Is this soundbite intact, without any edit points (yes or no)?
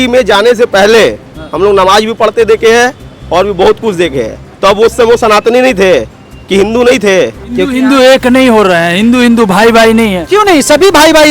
no